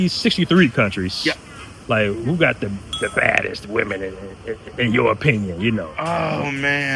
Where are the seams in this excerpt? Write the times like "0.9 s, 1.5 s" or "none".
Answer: none

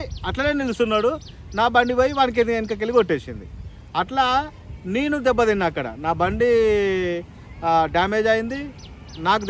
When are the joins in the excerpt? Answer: none

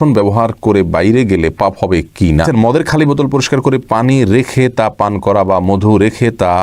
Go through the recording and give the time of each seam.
2.5 s

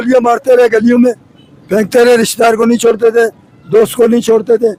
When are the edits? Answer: none

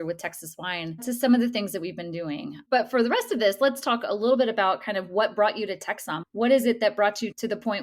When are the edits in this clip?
1.0 s

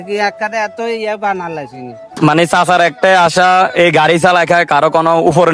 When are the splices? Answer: 2.0 s

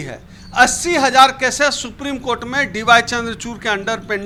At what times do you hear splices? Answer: none

